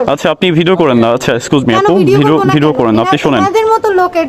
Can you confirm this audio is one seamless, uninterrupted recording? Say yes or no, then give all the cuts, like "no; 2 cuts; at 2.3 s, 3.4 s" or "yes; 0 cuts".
yes; 0 cuts